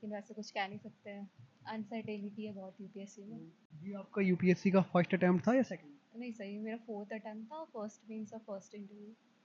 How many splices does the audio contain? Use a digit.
0